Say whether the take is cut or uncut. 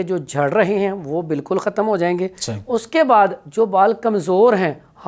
uncut